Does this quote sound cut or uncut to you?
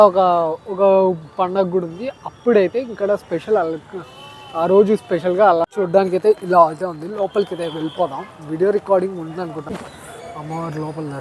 cut